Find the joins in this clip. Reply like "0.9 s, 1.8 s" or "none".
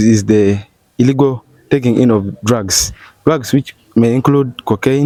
none